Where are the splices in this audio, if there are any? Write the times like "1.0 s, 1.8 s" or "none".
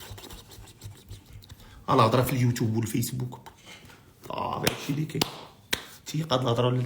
none